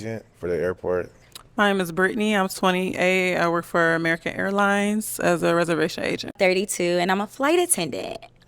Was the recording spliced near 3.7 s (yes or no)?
no